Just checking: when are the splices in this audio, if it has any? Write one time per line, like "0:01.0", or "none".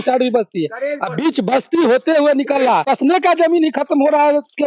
0:02.8